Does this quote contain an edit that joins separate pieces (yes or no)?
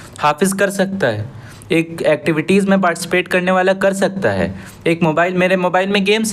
no